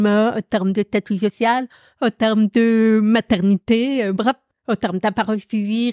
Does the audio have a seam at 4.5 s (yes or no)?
yes